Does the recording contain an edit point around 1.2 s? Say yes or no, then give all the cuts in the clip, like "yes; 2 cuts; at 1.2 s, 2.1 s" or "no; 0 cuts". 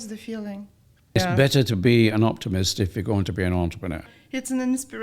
yes; 2 cuts; at 1.2 s, 4.1 s